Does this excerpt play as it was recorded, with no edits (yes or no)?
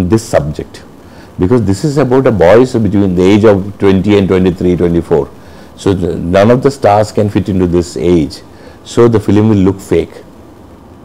yes